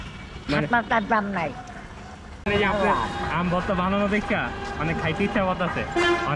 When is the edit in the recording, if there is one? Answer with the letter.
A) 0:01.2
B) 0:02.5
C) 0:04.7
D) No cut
B